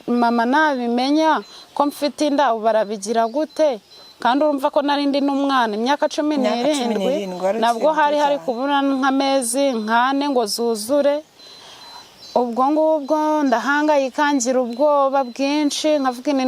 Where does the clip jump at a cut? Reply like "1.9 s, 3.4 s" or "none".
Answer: none